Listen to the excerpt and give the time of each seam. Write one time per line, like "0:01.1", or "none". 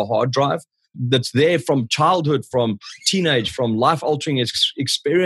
none